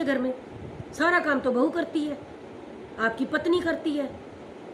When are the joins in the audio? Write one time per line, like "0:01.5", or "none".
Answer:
none